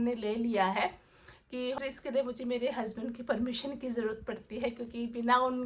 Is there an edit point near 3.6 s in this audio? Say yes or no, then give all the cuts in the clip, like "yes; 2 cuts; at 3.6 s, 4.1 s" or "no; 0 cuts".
no; 1 cut; at 1.8 s